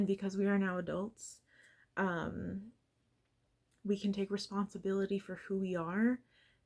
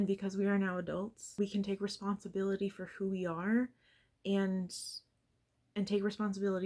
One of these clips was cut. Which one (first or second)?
second